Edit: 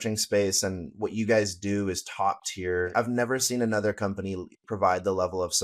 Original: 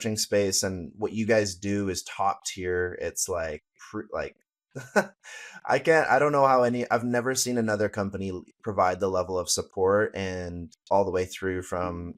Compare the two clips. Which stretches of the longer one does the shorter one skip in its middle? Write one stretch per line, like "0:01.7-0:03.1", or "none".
0:02.9-0:06.9